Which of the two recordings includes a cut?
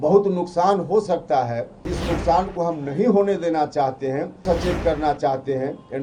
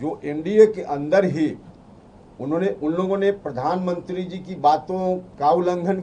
first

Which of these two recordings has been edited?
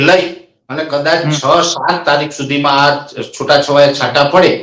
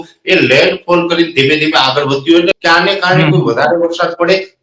second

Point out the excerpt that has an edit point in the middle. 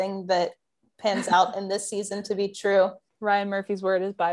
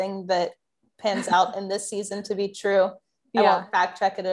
first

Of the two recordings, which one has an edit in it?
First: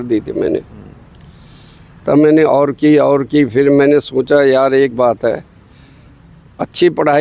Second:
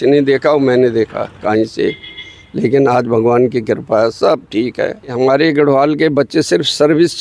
second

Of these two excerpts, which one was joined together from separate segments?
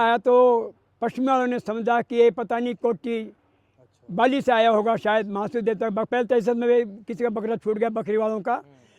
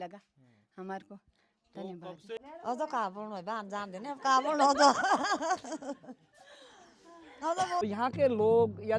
second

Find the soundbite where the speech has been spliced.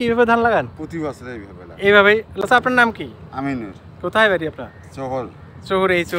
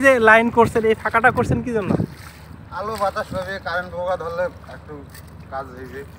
first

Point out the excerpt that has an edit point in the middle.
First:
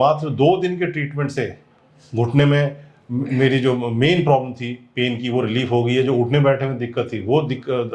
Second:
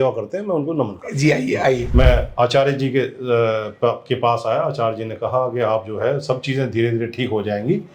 second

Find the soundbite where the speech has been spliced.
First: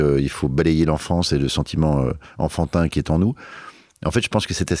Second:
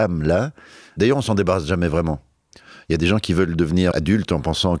second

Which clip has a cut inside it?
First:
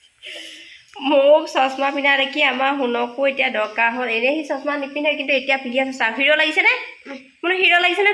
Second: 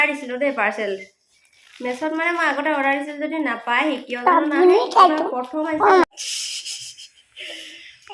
second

